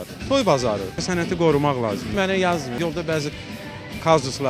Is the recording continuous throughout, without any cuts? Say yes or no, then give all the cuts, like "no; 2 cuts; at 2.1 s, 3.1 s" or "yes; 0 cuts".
yes; 0 cuts